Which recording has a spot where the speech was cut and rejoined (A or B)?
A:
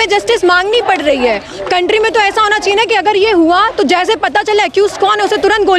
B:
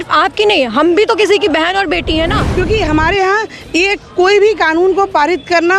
B